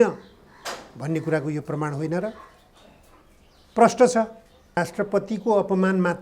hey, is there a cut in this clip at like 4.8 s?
yes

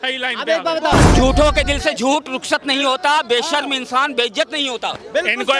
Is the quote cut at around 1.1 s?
yes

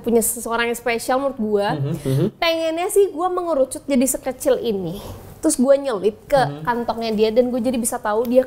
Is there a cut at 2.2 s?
no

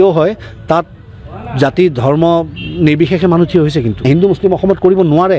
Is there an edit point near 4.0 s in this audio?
yes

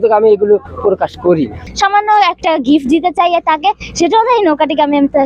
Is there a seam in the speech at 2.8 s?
no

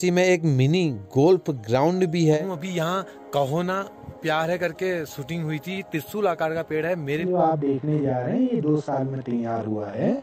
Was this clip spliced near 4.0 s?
no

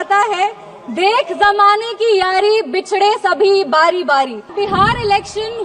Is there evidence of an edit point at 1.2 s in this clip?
no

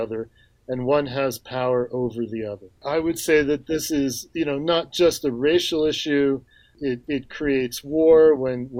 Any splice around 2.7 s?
yes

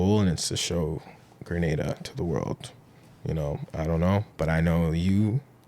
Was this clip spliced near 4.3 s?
yes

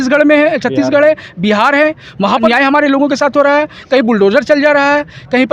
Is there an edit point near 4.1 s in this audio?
no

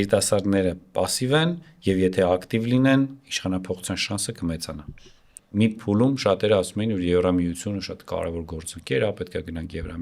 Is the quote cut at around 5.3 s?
yes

